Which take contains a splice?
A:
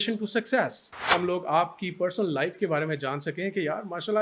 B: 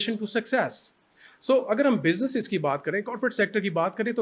A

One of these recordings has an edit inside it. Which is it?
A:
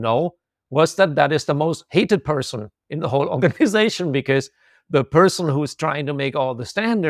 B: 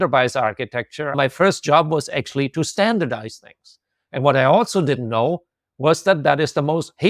B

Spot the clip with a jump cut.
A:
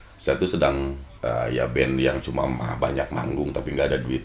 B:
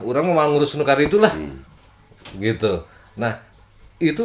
A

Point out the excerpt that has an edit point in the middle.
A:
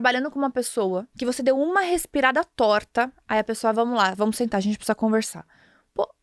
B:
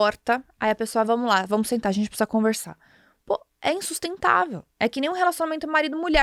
A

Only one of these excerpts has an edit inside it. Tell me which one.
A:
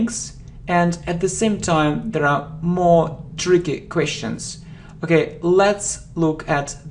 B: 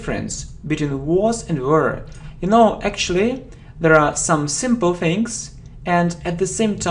A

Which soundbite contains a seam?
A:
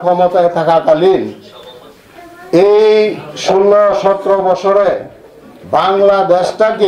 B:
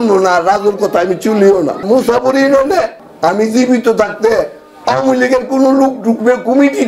B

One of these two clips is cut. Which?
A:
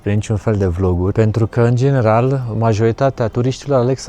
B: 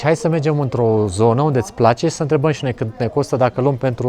A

